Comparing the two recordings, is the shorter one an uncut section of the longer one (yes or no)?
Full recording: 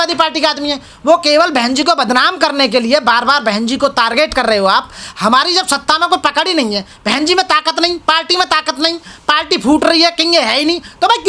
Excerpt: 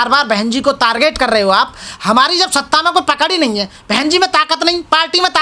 yes